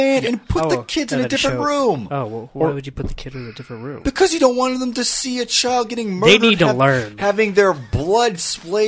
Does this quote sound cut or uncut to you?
uncut